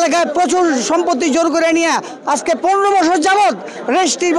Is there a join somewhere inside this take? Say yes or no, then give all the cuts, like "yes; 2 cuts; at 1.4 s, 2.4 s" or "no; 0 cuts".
no; 0 cuts